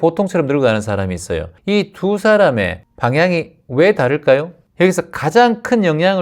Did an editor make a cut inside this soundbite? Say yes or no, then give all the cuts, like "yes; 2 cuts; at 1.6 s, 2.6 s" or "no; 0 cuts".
yes; 3 cuts; at 1.5 s, 2.8 s, 4.6 s